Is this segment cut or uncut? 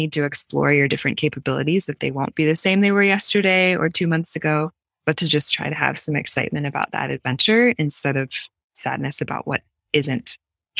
uncut